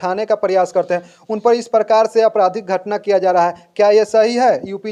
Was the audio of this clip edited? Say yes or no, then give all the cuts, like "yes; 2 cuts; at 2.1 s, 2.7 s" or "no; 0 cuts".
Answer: no; 0 cuts